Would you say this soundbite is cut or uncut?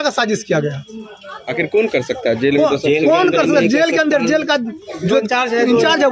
uncut